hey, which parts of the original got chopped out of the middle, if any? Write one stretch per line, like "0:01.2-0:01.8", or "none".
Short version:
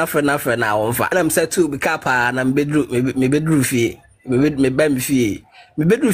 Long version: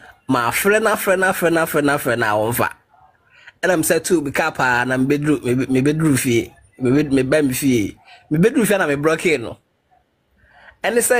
0:02.7-0:03.6